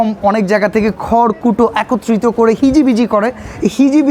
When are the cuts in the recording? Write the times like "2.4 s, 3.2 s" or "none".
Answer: none